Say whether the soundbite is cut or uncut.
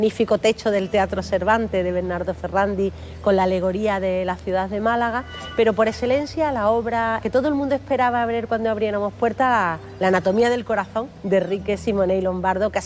cut